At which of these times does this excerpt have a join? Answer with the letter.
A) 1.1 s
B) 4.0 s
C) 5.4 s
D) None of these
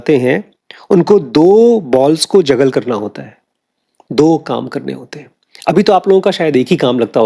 D